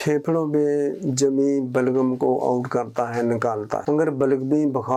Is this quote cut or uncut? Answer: uncut